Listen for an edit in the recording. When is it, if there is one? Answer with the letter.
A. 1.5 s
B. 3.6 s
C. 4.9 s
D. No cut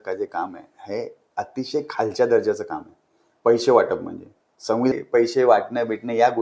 C